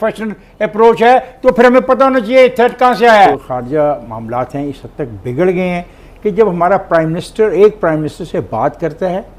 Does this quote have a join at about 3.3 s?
yes; 1 cut; at 3.3 s

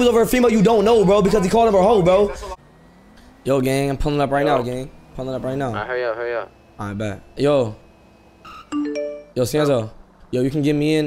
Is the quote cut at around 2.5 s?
yes; 1 cut; at 2.5 s

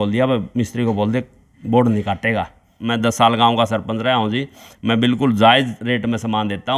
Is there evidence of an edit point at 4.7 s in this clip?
no; 1 cut; at 2.7 s

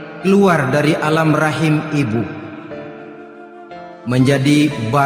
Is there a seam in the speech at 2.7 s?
yes; 2 cuts; at 2.7 s, 4.1 s

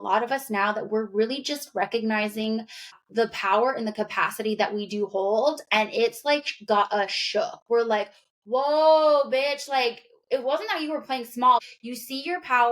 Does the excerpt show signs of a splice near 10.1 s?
no; 2 cuts; at 2.8 s, 11.7 s

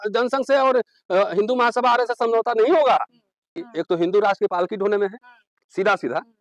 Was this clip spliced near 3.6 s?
yes; 1 cut; at 3.6 s

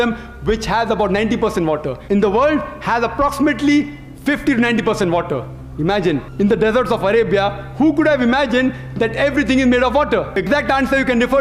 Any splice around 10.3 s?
yes; 3 cuts; at 1.9 s, 6.3 s, 10.3 s

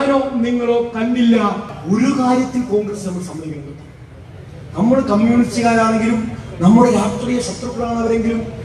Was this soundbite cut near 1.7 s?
yes; 1 cut; at 1.7 s

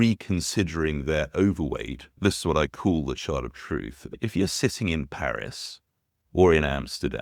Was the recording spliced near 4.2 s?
yes; 2 cuts; at 2.2 s, 4.2 s

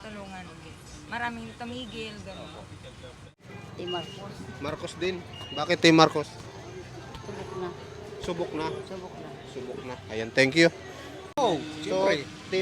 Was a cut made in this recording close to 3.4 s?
yes; 2 cuts; at 3.4 s, 11.3 s

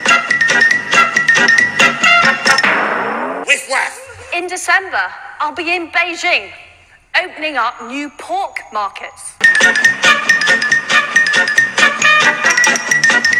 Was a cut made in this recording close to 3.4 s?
yes; 1 cut; at 3.4 s

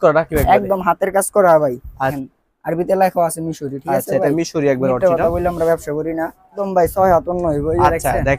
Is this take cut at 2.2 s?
yes; 2 cuts; at 2.2 s, 6.6 s

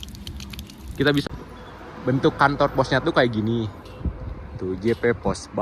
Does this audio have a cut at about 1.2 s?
yes; 1 cut; at 1.2 s

